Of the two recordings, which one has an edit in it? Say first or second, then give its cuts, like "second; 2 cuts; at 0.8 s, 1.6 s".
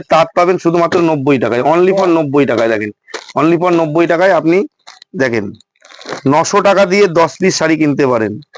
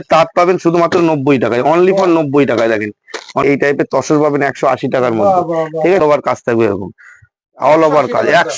second; 2 cuts; at 3.4 s, 6.0 s